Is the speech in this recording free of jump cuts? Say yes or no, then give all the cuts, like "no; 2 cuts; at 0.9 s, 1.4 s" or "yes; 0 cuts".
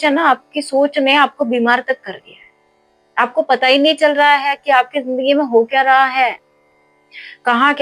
yes; 0 cuts